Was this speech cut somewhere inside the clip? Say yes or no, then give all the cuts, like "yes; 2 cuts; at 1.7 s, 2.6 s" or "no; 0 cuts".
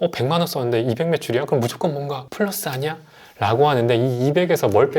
yes; 1 cut; at 2.3 s